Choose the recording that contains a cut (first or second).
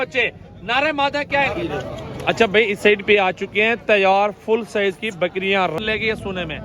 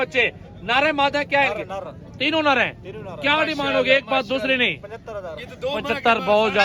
first